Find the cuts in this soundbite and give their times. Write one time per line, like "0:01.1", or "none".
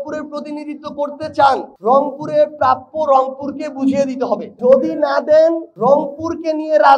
none